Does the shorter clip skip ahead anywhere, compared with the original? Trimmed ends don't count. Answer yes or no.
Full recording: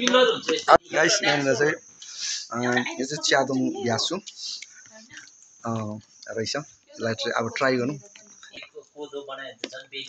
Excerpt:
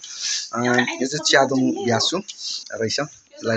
yes